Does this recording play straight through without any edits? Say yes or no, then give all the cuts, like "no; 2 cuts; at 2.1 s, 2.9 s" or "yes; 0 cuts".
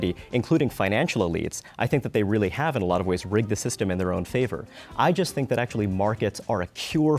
yes; 0 cuts